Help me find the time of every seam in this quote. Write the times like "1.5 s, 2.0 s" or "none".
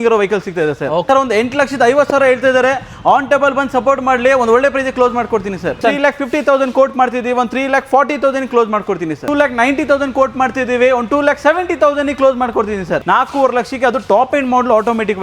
1.0 s, 5.8 s, 9.2 s, 13.0 s